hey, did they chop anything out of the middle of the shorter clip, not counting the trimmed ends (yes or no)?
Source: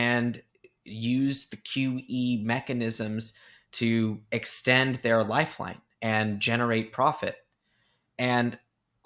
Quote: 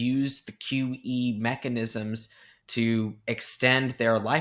no